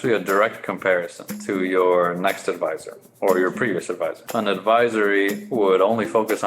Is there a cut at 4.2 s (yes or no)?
yes